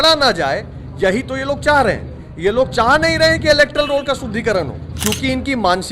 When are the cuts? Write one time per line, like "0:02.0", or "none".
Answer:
0:04.8